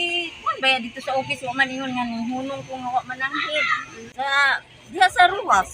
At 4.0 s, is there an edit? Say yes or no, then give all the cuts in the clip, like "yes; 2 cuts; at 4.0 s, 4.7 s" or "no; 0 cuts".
yes; 1 cut; at 4.0 s